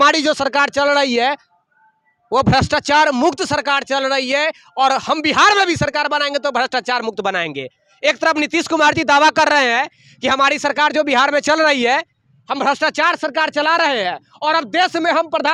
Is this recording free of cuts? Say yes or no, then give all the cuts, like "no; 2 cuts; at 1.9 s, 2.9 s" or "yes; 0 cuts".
yes; 0 cuts